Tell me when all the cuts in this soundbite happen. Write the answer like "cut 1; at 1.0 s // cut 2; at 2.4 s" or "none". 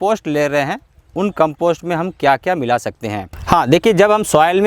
cut 1; at 3.3 s